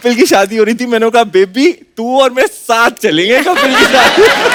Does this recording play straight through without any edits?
yes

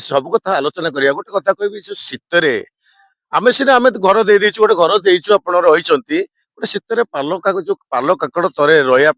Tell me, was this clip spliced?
no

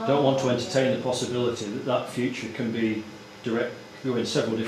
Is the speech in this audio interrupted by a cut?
no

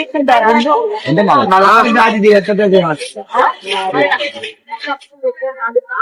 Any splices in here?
no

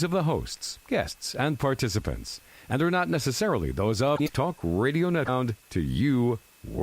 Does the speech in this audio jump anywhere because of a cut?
yes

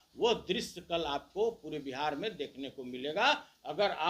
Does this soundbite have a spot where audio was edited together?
no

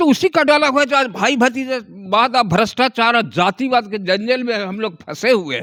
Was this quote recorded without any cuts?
yes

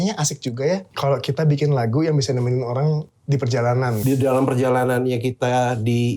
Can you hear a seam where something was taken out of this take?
yes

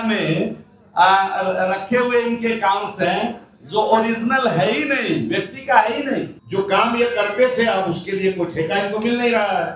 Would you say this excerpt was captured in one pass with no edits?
no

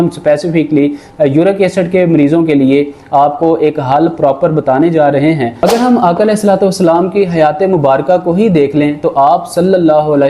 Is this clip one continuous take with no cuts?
no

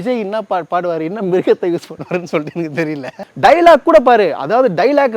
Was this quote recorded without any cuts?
no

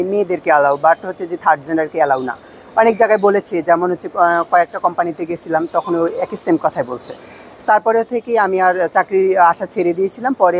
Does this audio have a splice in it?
no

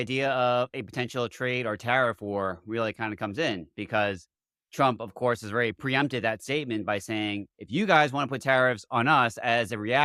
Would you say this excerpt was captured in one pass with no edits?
yes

